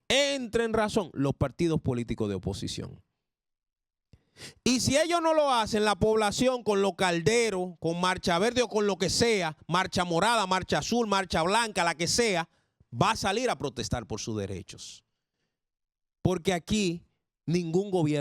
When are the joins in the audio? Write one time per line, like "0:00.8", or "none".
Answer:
none